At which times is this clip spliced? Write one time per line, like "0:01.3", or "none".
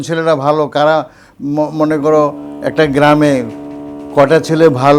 none